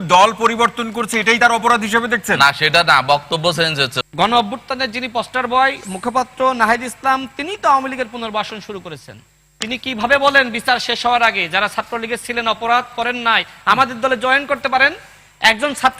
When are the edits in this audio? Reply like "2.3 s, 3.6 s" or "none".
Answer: none